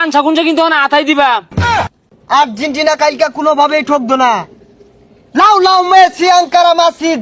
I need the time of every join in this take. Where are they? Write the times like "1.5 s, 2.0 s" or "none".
1.9 s